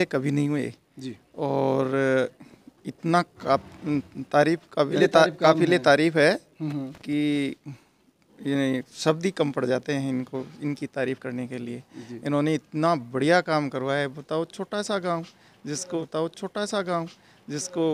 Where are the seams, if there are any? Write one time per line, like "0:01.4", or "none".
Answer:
none